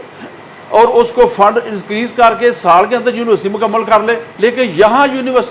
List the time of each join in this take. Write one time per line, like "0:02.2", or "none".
0:04.3